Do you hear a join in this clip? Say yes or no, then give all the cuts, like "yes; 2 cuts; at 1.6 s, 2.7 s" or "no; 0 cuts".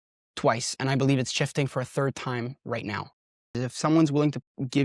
yes; 1 cut; at 3.6 s